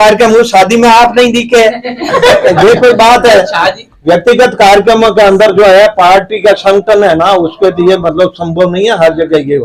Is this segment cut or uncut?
uncut